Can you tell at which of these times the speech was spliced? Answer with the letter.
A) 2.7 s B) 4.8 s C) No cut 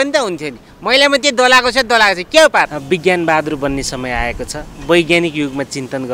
A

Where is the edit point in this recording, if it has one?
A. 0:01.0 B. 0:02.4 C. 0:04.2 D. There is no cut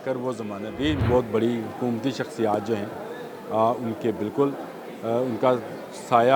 A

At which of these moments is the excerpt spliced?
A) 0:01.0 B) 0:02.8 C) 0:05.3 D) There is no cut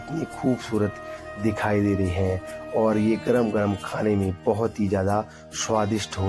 D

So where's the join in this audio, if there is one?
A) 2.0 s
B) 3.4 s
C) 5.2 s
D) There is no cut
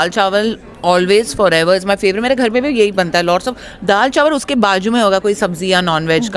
D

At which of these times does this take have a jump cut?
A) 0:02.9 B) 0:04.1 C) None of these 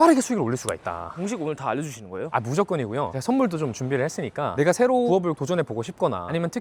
C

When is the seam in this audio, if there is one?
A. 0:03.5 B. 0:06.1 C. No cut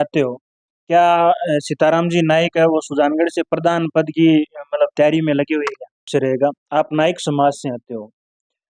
B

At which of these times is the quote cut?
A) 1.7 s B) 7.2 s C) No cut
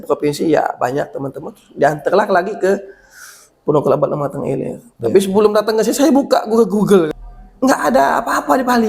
B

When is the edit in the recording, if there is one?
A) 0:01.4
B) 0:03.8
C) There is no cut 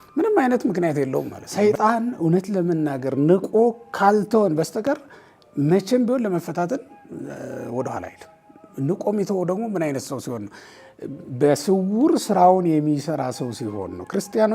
A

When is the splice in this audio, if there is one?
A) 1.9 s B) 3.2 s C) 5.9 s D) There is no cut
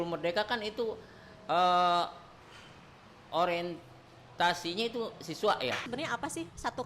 C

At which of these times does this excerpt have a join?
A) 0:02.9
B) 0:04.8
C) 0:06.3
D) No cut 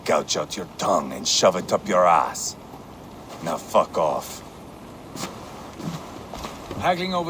B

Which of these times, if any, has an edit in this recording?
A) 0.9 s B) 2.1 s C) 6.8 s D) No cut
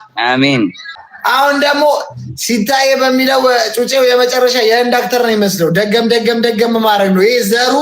A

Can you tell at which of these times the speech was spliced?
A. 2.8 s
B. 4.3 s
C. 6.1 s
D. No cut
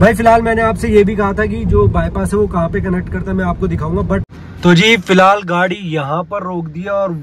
B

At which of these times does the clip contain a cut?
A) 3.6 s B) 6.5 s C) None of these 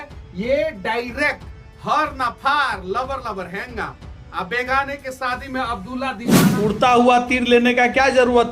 B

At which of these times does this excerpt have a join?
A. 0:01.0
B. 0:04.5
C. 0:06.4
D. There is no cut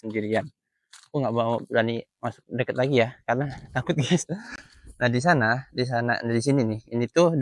D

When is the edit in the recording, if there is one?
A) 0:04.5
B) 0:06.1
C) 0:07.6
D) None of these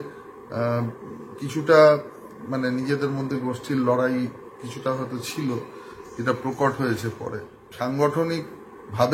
C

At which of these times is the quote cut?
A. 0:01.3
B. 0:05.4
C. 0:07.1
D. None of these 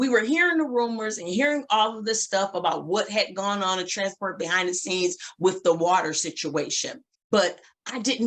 C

